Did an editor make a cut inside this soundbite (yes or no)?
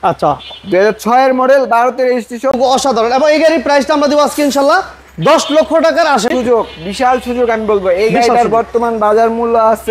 yes